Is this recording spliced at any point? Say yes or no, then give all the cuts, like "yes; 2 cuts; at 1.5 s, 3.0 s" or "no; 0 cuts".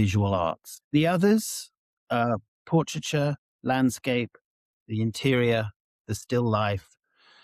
no; 0 cuts